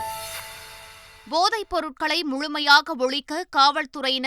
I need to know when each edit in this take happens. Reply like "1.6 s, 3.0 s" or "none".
1.2 s